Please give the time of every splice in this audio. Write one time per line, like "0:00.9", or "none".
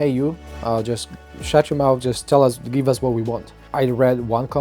none